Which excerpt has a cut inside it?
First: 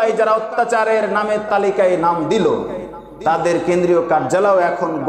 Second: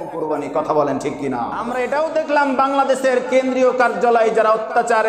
second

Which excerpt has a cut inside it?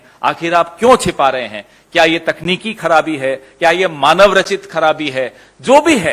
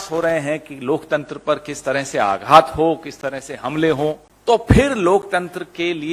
second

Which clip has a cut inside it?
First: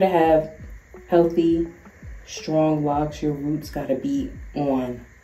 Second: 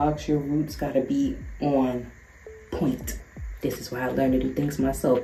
second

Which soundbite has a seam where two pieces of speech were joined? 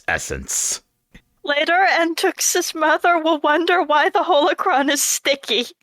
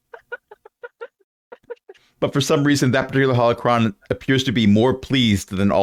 first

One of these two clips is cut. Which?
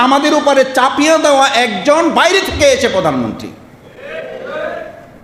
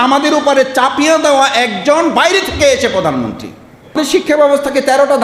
second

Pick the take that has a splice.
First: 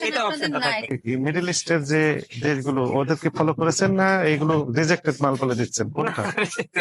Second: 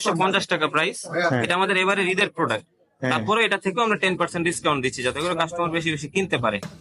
first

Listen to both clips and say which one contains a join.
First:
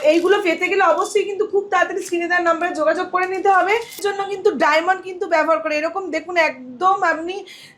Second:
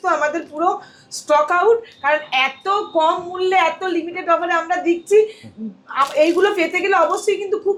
first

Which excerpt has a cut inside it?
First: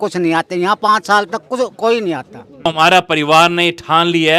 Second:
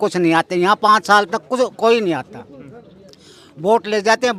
first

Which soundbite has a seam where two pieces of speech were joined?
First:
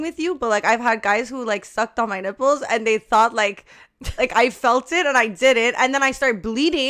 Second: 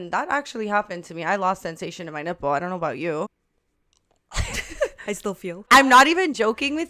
second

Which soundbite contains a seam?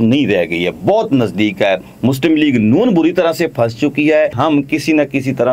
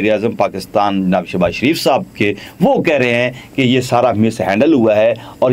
first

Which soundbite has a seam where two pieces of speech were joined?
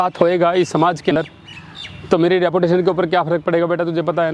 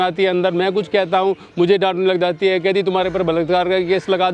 first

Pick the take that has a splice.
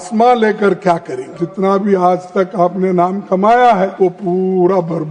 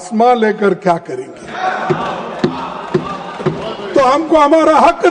first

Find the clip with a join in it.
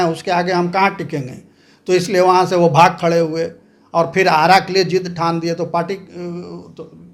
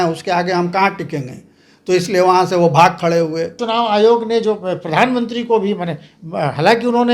second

